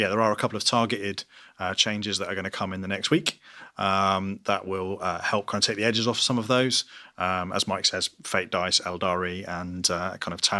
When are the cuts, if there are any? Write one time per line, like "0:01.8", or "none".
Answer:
none

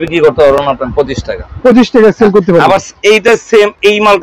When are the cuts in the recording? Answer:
none

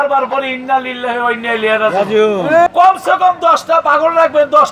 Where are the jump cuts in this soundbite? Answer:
0:02.7

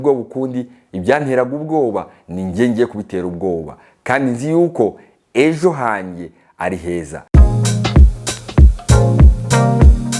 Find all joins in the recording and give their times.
0:07.4

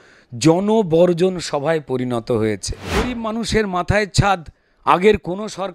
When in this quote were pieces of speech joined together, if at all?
0:02.9

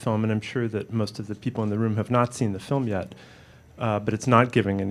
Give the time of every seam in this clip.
none

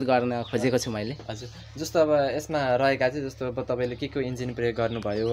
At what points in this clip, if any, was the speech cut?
none

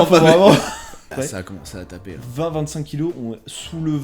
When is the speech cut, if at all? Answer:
0:01.0

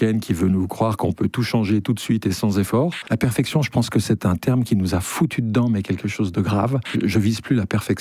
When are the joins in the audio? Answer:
0:03.0
0:06.9

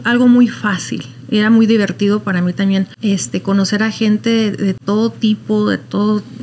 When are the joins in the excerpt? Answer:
0:02.9
0:04.8

